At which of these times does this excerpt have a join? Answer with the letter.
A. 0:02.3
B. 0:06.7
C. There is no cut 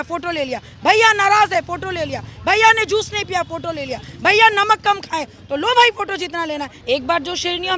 B